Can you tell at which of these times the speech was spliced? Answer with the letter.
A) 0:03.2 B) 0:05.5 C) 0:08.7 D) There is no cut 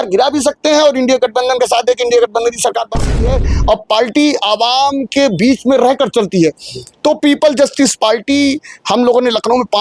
A